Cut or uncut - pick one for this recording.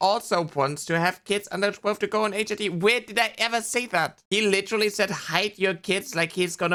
uncut